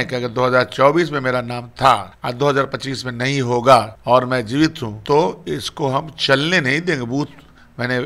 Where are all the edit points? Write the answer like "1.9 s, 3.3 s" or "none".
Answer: 2.2 s, 3.9 s, 4.9 s